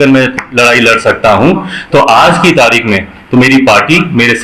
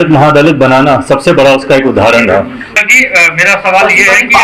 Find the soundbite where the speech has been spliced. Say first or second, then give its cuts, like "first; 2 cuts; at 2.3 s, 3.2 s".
second; 1 cut; at 2.7 s